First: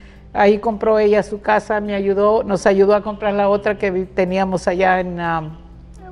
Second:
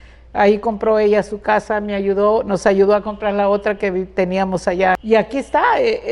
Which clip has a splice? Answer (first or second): second